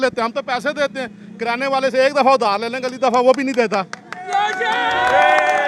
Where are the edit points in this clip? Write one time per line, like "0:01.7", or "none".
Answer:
none